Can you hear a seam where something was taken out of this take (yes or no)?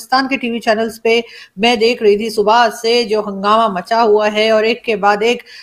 no